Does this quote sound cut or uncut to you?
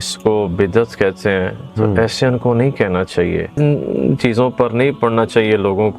cut